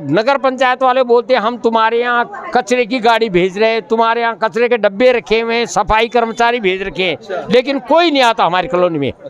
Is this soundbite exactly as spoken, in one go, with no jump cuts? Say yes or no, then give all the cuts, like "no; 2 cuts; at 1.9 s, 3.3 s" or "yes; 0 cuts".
yes; 0 cuts